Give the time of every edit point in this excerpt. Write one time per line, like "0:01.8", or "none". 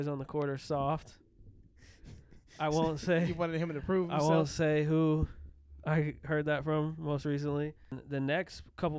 0:08.0

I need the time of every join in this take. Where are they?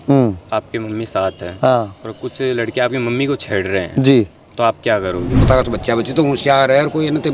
0:05.4

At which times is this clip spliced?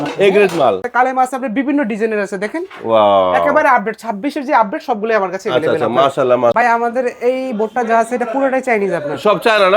0:00.9
0:06.5

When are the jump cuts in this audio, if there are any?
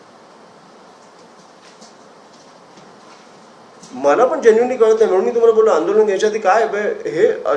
none

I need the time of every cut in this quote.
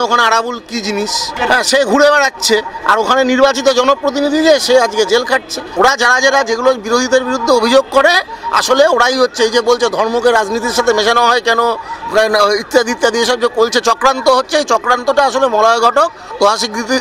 0:01.3
0:05.6

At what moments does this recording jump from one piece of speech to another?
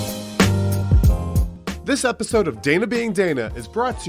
0:01.5

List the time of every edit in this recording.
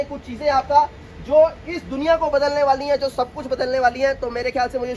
none

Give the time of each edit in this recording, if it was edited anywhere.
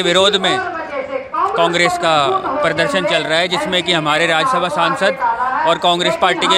none

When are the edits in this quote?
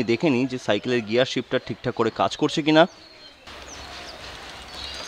none

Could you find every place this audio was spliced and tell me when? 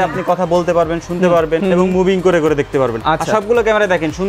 0:01.6

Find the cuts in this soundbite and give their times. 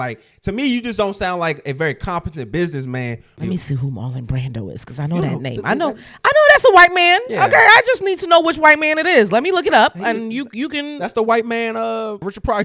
0:03.3

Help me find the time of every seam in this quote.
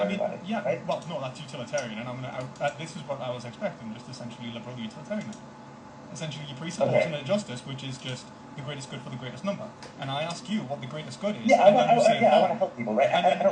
none

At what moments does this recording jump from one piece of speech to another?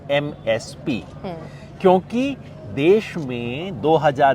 none

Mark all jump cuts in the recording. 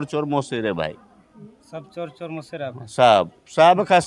none

